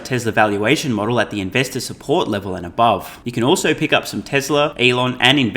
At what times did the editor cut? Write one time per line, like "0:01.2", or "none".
0:03.2
0:04.7